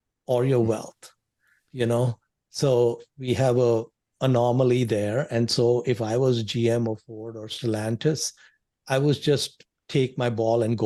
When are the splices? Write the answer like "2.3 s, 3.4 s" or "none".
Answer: none